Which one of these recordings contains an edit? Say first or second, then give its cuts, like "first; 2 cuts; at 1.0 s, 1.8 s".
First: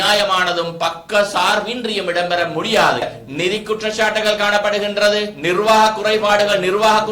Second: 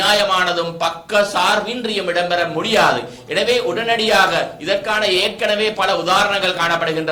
first; 1 cut; at 3.2 s